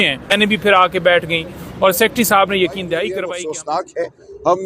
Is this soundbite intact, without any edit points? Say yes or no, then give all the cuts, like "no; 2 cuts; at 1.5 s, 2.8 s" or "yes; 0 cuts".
no; 1 cut; at 3.1 s